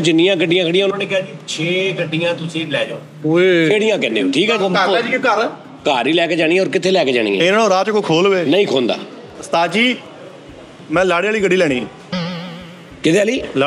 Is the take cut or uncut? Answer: uncut